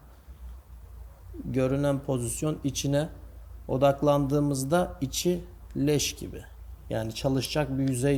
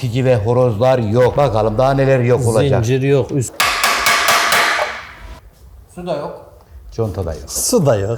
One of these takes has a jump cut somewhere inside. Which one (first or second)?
second